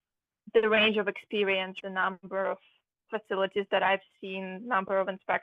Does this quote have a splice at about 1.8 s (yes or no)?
yes